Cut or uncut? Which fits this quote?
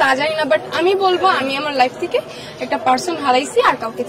uncut